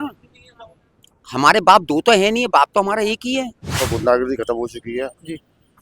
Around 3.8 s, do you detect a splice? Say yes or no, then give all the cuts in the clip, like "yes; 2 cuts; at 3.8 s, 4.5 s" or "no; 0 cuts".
yes; 1 cut; at 3.8 s